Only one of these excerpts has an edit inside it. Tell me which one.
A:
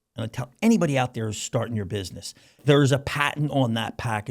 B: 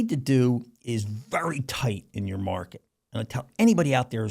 A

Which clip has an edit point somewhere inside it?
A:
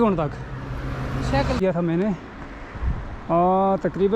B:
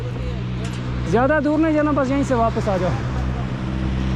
A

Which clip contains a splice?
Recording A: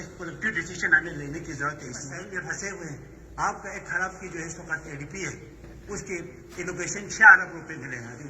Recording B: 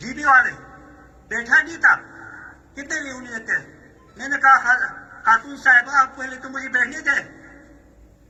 A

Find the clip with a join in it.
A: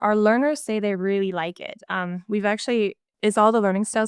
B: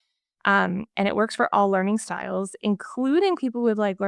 A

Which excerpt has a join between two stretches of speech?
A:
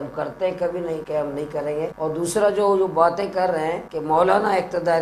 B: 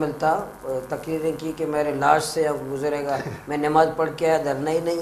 A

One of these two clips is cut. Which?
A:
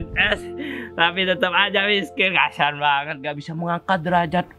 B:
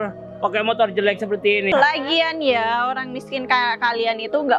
B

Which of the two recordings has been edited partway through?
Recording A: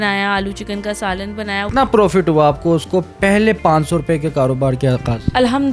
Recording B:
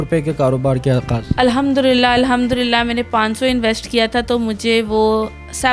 A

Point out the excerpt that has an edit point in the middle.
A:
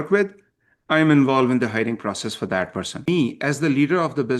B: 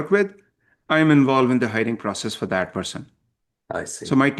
A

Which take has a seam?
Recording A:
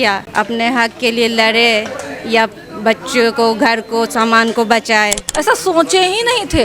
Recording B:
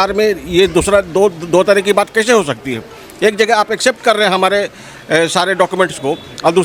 A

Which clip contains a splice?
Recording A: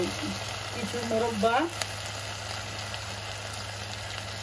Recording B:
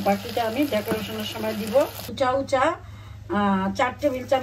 B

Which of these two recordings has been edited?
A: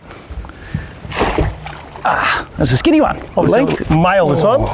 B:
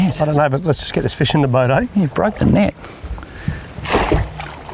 A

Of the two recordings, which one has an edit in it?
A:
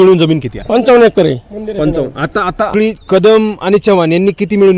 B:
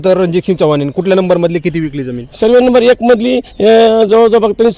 A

